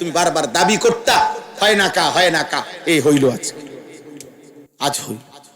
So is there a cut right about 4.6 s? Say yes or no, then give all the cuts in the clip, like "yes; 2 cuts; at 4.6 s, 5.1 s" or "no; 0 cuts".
yes; 1 cut; at 4.6 s